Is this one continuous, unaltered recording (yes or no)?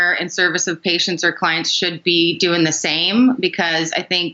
yes